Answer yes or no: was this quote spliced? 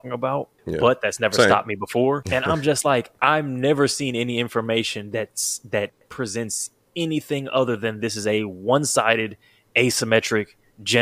yes